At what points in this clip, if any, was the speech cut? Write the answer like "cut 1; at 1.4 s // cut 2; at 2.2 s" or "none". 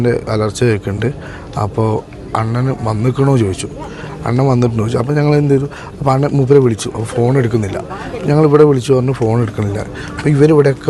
none